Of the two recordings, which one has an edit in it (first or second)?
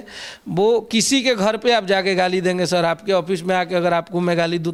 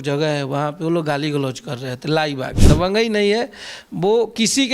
second